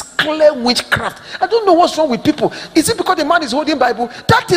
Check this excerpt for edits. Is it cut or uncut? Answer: uncut